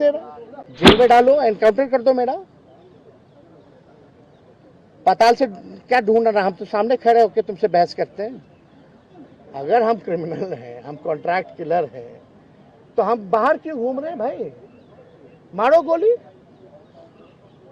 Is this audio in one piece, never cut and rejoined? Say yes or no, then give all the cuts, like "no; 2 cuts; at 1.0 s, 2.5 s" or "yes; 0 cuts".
no; 1 cut; at 0.9 s